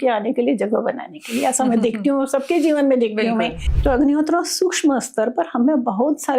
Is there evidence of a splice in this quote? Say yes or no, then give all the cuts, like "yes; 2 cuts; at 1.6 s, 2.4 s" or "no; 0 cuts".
yes; 1 cut; at 3.6 s